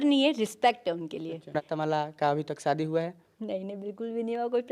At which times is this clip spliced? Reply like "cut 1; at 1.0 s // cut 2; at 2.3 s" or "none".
cut 1; at 1.6 s